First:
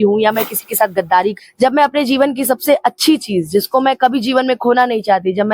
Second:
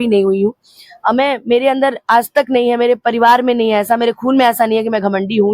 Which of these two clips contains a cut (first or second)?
first